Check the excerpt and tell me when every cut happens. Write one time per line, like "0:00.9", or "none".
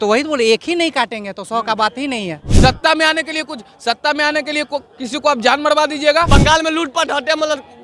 0:02.4
0:06.3